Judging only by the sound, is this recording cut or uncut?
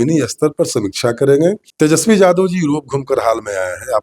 cut